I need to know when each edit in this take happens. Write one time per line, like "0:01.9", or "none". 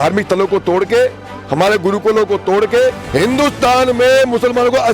0:03.0